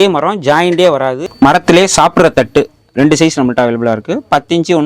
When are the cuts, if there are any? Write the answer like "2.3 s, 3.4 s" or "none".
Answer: 1.3 s